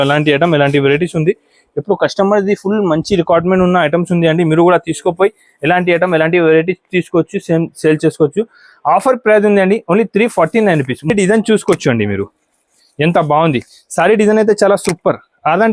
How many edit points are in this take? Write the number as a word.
one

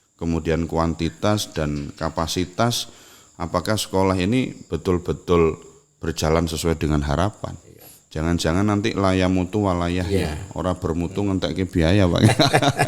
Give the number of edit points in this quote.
zero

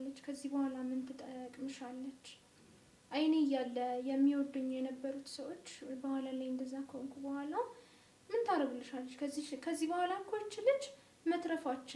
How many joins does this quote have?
zero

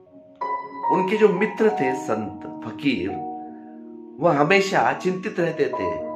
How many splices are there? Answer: one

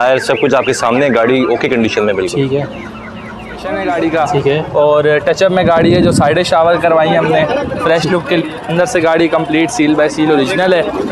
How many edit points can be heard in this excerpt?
one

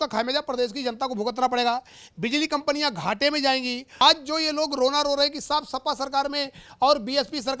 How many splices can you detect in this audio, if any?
one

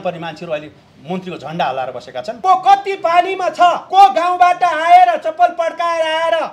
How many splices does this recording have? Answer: two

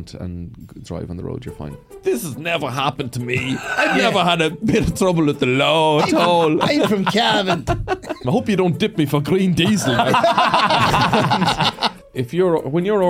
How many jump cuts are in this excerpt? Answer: three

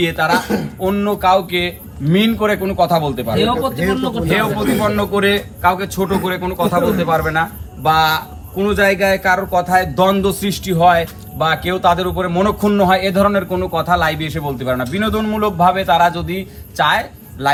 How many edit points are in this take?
zero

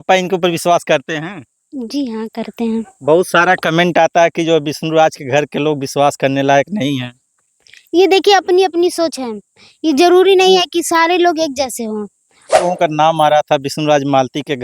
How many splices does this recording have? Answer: one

